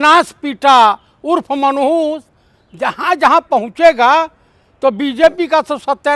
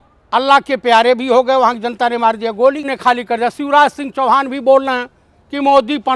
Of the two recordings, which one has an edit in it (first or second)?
second